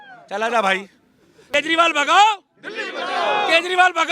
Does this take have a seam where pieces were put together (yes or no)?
yes